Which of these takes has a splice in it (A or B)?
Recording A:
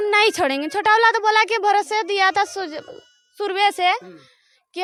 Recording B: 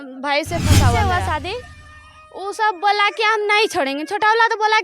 B